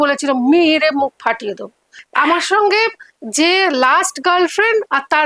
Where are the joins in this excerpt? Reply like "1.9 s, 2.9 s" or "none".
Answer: 1.9 s